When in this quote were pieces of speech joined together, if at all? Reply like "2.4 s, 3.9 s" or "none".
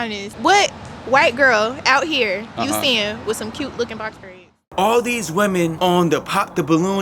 4.7 s, 5.7 s